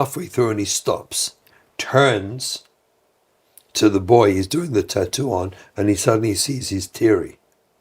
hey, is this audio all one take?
no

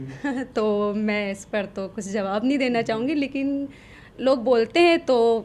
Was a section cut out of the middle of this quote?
no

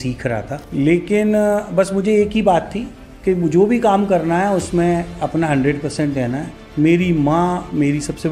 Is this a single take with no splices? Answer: no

